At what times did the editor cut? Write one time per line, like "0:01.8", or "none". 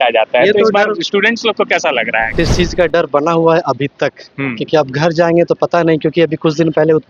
0:02.3